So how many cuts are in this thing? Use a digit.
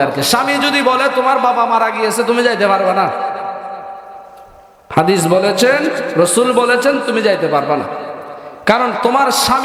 0